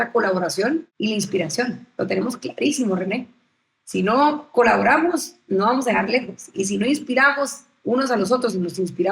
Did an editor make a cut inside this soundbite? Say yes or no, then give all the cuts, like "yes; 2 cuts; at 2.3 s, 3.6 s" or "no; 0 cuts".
yes; 1 cut; at 0.9 s